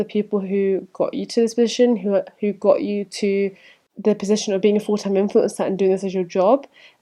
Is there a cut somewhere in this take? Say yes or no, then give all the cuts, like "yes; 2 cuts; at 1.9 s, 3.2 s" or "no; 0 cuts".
no; 0 cuts